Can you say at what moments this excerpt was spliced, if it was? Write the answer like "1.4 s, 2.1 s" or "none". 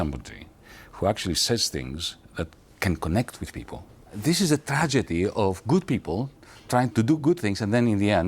4.1 s, 6.9 s